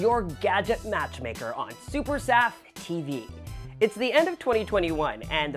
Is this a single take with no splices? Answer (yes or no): yes